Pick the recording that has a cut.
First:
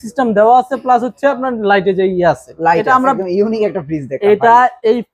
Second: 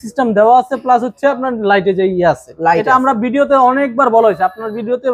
first; 1 cut; at 3.2 s

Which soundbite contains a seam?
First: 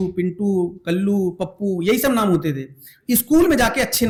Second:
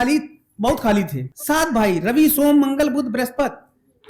second; 1 cut; at 1.3 s

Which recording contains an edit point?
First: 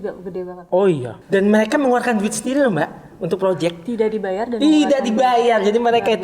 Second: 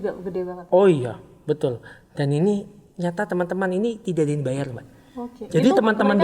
first; 1 cut; at 1.1 s

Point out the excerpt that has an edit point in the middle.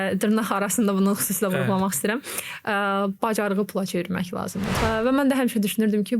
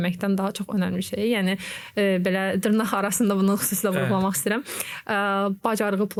first; 1 cut; at 4.7 s

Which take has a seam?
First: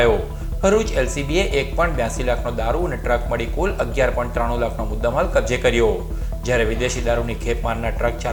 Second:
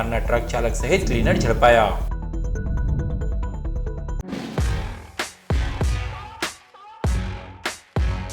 second; 1 cut; at 4.1 s

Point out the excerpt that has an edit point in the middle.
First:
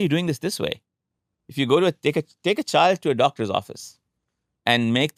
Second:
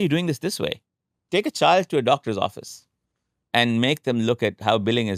second; 1 cut; at 1.2 s

